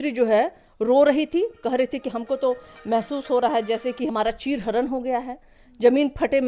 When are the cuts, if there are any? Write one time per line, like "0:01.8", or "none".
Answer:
0:04.1